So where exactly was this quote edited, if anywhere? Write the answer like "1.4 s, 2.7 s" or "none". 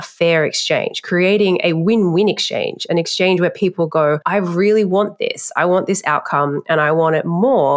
none